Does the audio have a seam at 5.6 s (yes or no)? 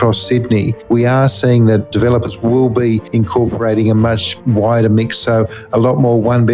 no